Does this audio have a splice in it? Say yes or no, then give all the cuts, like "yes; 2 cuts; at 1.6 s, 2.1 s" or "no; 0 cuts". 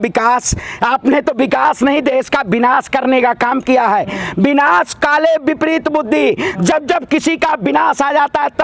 no; 0 cuts